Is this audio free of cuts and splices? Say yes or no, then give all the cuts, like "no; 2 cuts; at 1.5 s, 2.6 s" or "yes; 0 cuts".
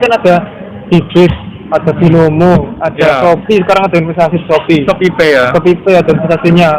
yes; 0 cuts